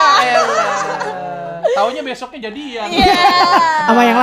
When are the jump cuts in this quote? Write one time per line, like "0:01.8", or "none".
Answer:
none